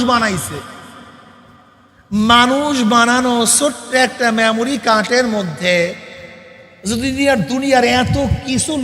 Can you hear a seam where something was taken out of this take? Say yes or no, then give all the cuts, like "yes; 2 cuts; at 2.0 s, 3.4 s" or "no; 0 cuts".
no; 0 cuts